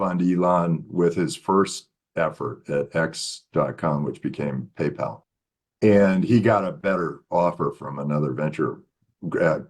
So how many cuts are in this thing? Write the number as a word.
one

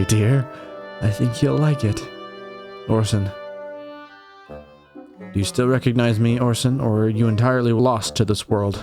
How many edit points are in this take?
one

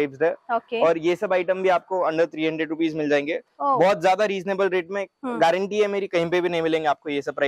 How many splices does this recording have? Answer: zero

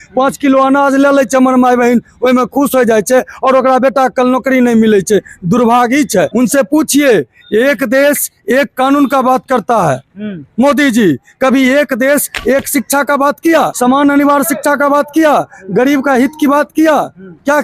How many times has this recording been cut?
two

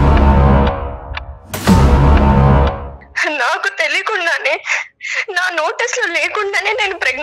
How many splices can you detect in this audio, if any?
one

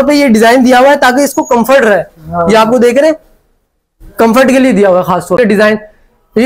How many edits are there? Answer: one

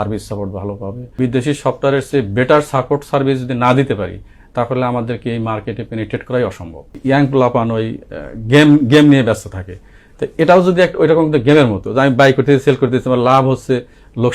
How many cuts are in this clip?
two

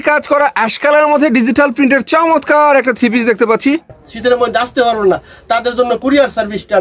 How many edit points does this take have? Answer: one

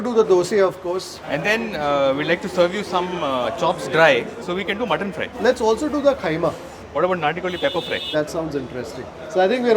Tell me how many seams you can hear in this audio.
three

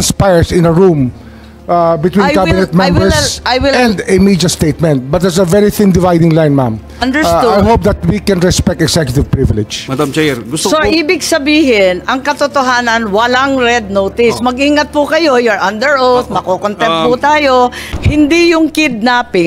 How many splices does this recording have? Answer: two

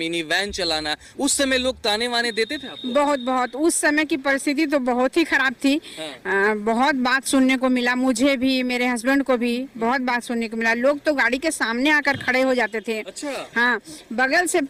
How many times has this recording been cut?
zero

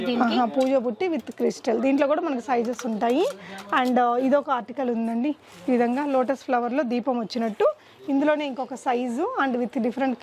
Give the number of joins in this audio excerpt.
zero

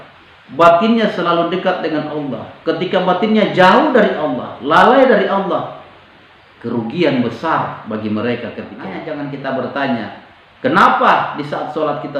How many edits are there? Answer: one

